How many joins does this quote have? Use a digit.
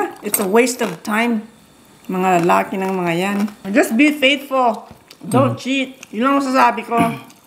1